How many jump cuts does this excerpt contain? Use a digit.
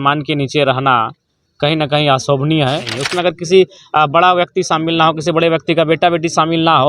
1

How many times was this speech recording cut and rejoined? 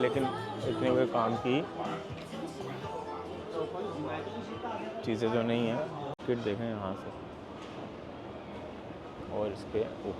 1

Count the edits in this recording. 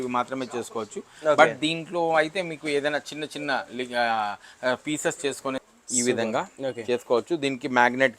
1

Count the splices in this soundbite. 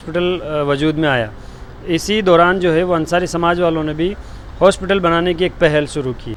0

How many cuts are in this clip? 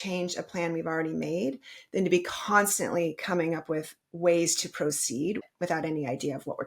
1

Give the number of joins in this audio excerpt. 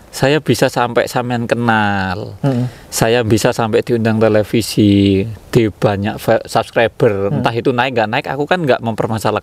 0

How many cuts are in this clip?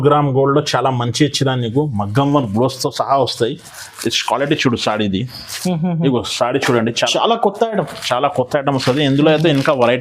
1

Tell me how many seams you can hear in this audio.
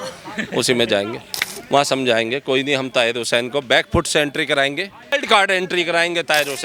1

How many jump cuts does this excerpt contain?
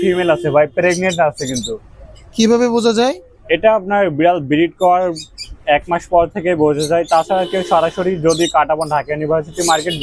0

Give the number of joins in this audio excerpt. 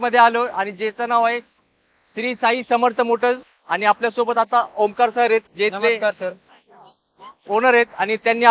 0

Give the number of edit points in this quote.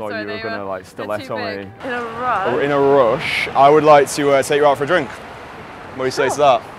1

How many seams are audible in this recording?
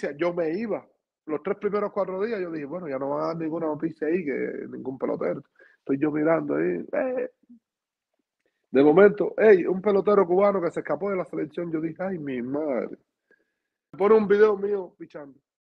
1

